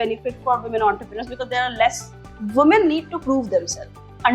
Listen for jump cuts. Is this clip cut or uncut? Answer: cut